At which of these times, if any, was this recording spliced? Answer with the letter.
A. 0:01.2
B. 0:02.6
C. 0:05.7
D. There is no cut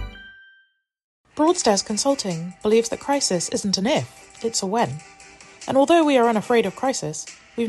A